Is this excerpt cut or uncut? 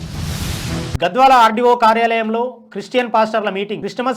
cut